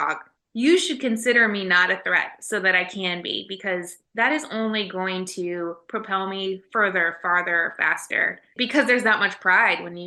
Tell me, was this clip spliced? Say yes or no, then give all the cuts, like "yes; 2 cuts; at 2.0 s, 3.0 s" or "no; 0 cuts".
no; 0 cuts